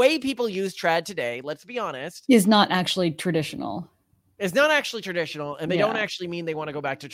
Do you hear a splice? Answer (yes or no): no